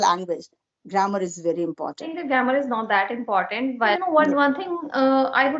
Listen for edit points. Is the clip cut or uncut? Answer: cut